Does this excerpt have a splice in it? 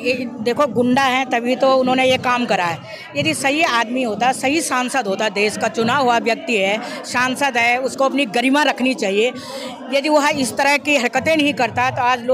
no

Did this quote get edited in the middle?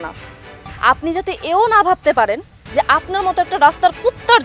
no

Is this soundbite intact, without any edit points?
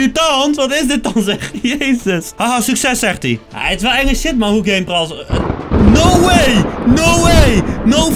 no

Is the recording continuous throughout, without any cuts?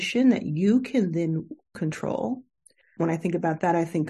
no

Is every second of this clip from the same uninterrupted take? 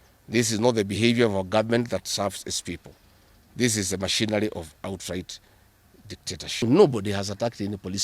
no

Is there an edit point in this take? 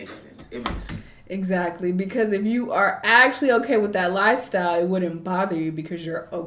no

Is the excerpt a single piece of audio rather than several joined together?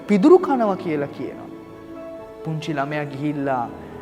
yes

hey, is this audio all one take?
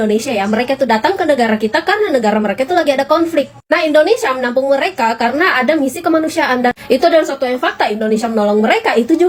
yes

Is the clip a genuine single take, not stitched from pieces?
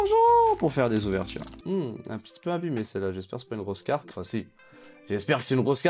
no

